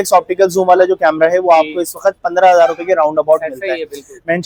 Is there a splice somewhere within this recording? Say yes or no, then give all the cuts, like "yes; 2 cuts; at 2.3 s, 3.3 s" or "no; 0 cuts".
no; 0 cuts